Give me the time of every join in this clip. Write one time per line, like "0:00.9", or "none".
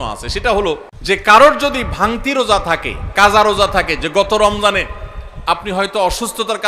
0:00.9